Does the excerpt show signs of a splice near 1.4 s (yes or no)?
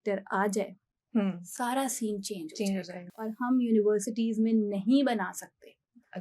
no